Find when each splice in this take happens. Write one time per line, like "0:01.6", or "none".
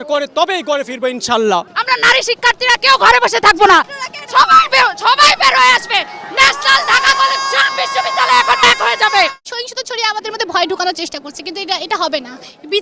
0:01.7
0:09.4